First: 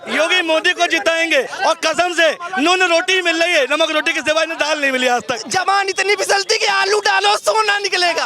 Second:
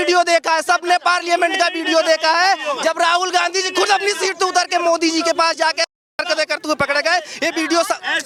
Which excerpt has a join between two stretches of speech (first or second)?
first